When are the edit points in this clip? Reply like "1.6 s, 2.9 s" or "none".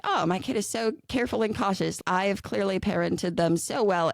2.0 s